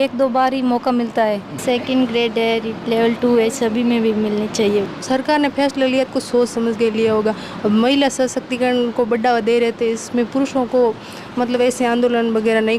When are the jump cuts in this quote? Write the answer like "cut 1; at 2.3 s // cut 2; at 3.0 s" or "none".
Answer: cut 1; at 1.5 s // cut 2; at 4.9 s